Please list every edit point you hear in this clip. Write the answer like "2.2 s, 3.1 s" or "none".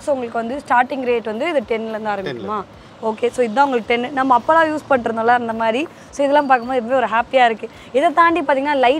none